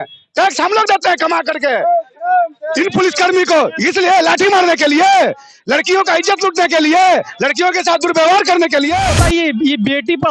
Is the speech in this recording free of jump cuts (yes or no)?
no